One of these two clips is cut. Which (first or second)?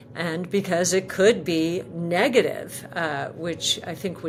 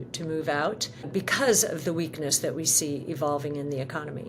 second